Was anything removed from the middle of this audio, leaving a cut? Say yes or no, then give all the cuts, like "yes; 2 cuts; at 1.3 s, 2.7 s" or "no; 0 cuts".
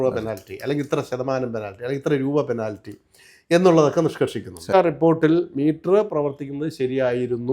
yes; 1 cut; at 4.7 s